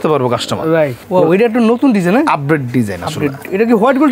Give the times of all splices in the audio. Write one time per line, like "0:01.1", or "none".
0:01.0